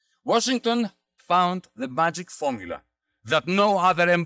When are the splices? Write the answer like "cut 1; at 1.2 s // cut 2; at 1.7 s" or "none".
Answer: cut 1; at 1.1 s